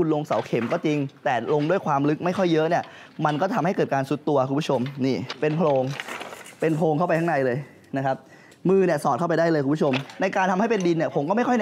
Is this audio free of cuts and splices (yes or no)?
no